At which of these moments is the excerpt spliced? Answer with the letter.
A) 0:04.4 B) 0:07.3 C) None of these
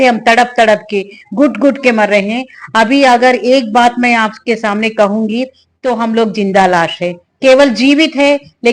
C